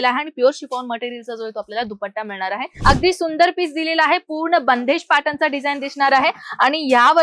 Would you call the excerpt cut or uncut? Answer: cut